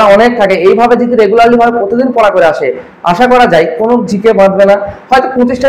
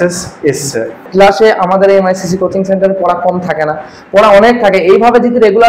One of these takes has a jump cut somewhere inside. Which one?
second; 1 cut; at 1.0 s

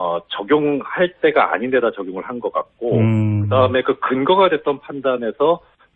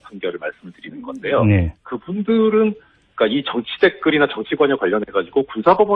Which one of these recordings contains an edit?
second; 1 cut; at 2.2 s

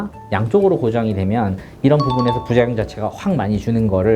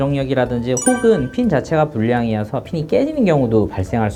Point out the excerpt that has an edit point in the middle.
first; 1 cut; at 1.6 s

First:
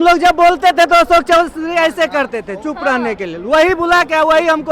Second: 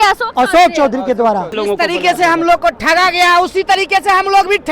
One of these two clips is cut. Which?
second; 1 cut; at 1.5 s

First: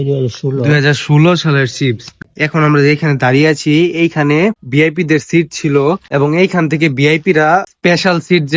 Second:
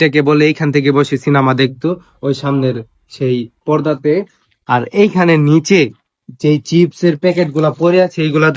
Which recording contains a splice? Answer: first; 4 cuts; at 2.2 s, 4.6 s, 6.0 s, 7.7 s

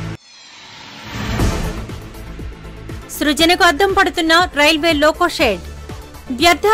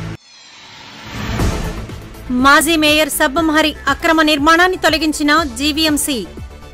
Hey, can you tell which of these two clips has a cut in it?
first; 1 cut; at 2.1 s

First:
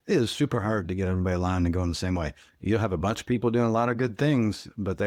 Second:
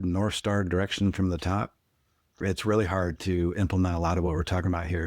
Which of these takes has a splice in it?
second; 2 cuts; at 2.3 s, 3.2 s

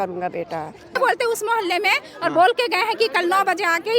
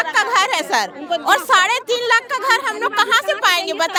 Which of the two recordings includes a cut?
first; 1 cut; at 1.0 s

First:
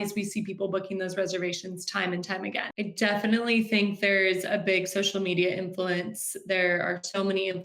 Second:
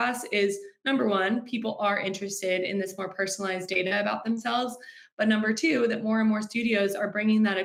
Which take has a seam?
first; 1 cut; at 2.6 s

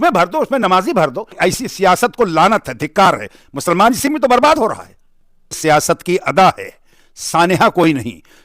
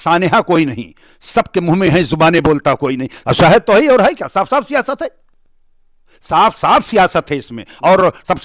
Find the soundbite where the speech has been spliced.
first; 2 cuts; at 1.3 s, 5.6 s

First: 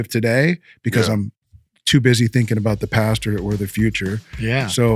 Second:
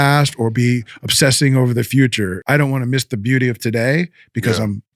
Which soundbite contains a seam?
second; 1 cut; at 2.4 s

